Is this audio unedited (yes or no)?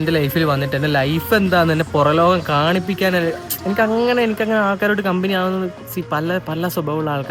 yes